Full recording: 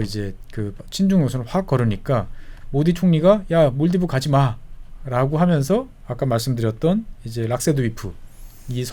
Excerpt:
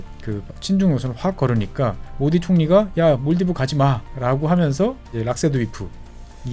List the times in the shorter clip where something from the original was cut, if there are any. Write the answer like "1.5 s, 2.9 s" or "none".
2.0 s, 4.1 s, 5.0 s